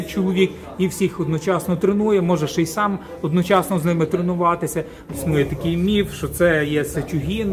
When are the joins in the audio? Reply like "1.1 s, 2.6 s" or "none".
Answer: 5.0 s